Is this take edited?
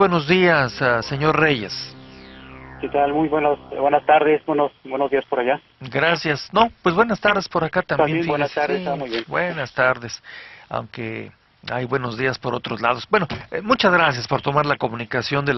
yes; 1 cut; at 8.1 s

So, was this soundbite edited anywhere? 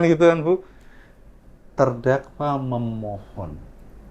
no; 0 cuts

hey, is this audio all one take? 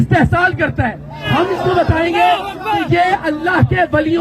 no; 1 cut; at 1.2 s

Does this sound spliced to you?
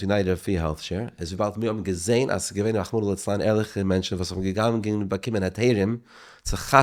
no; 0 cuts

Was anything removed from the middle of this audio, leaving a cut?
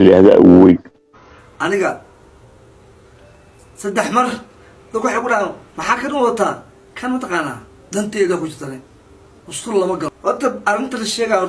yes; 2 cuts; at 1.4 s, 10.2 s

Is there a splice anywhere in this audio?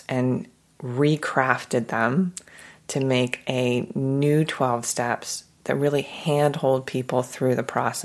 no; 0 cuts

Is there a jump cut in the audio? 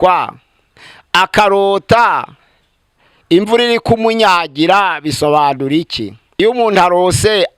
yes; 1 cut; at 6.4 s

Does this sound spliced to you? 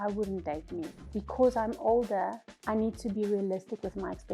yes; 2 cuts; at 1.1 s, 2.5 s

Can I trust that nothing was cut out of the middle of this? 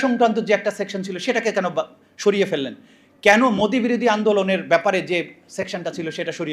yes; 0 cuts

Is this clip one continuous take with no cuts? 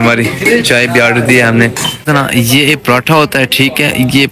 no; 1 cut; at 2.0 s

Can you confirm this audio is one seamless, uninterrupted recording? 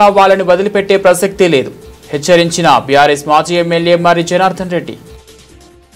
no; 1 cut; at 5.0 s

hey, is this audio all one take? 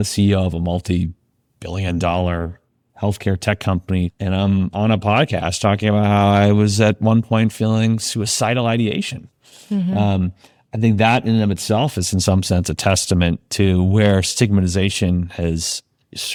yes; 0 cuts

